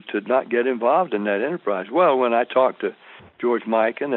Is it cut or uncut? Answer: uncut